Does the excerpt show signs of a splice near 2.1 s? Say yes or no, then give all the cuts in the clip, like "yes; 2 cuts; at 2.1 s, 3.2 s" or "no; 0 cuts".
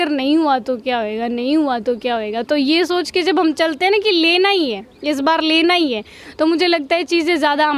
no; 0 cuts